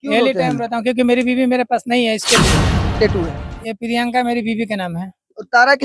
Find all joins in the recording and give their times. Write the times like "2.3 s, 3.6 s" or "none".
2.7 s